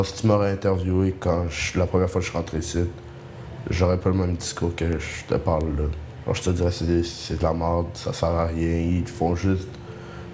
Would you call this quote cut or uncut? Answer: uncut